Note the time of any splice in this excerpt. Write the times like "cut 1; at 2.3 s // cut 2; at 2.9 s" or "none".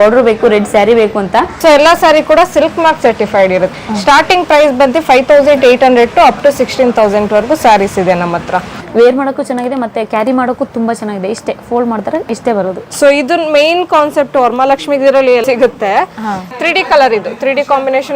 cut 1; at 1.5 s // cut 2; at 3.7 s // cut 3; at 8.7 s // cut 4; at 12.8 s // cut 5; at 15.4 s